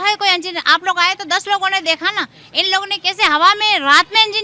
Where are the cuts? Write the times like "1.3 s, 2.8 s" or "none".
none